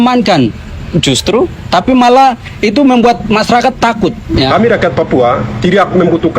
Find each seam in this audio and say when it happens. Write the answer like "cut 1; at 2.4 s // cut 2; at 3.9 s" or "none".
cut 1; at 4.5 s